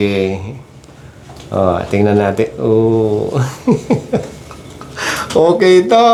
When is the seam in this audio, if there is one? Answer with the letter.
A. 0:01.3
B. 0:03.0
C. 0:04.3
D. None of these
D